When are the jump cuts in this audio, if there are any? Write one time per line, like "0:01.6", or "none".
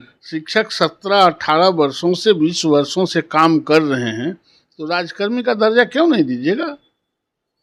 none

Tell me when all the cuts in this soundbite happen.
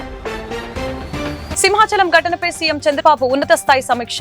0:01.1

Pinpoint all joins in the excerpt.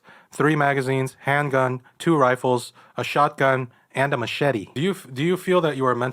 0:04.7

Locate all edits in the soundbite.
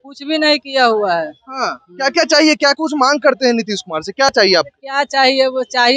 none

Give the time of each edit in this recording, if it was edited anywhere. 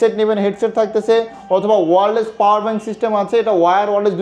none

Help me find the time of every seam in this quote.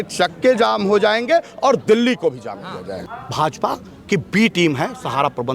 0:03.0

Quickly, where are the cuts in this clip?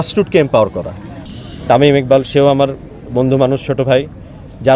0:01.2

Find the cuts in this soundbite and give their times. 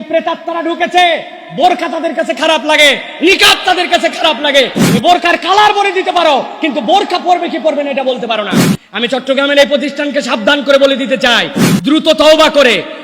0:04.8

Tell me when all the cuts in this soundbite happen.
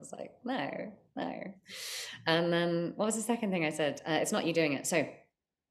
none

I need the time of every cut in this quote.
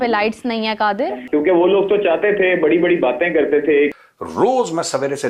0:01.2
0:03.9

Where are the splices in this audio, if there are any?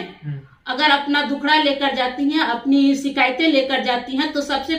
none

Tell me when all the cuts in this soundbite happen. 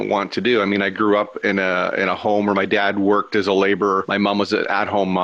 0:04.1

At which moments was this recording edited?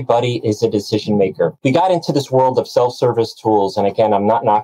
0:01.6

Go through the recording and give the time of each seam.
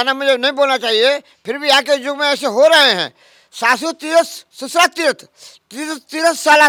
none

